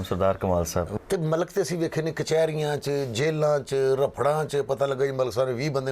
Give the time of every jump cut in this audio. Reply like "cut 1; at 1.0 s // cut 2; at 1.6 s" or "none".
cut 1; at 0.9 s